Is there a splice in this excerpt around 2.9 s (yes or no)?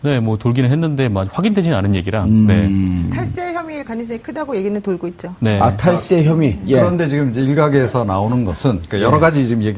no